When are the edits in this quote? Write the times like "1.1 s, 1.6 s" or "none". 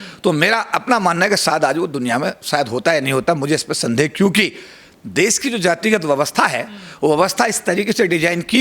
none